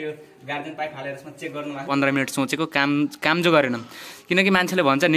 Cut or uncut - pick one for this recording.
cut